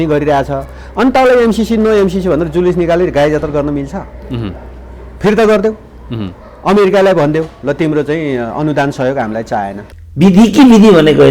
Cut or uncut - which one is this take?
cut